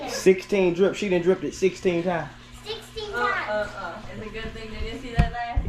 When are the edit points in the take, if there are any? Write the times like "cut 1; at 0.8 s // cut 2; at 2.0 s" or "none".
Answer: cut 1; at 4.1 s